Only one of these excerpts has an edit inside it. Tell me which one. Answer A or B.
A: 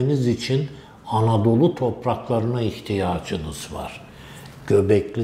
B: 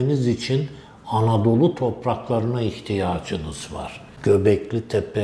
B